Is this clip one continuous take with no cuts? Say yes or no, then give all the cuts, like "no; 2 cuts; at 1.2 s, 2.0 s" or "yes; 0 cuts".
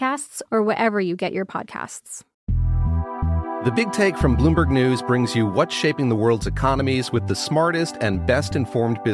no; 1 cut; at 2.2 s